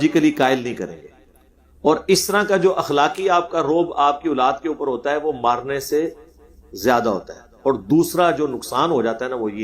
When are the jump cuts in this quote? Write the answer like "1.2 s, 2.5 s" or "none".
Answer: none